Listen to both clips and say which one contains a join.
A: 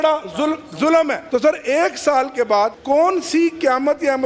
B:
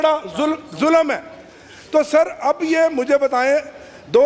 A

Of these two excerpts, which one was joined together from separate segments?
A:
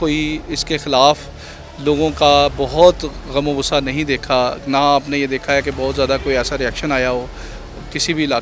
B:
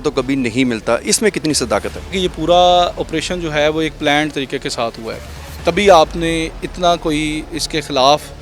B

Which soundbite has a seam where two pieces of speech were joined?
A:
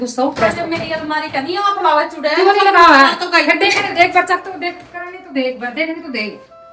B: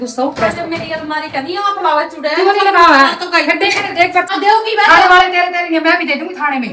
B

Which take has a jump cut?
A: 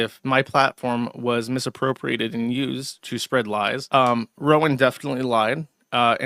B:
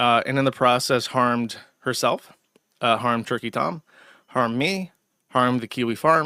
A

